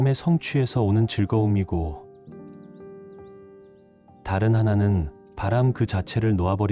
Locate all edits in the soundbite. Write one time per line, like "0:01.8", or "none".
0:01.9
0:04.2